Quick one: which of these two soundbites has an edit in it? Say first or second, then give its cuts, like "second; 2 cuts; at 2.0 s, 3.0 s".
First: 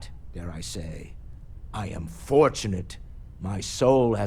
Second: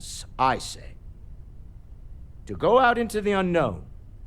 second; 2 cuts; at 0.9 s, 2.3 s